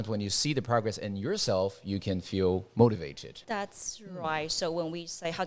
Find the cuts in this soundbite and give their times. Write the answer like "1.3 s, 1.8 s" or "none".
3.3 s